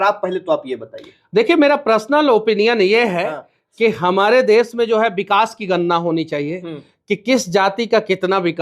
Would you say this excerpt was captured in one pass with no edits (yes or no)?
yes